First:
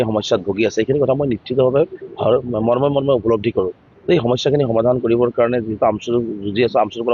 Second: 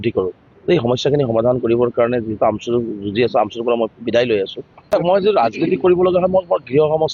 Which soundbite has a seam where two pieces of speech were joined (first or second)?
second